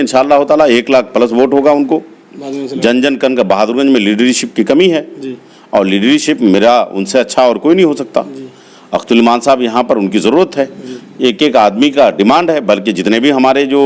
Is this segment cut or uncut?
uncut